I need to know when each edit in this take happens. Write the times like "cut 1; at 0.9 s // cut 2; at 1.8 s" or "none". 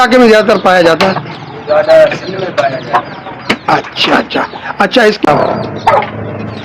cut 1; at 5.3 s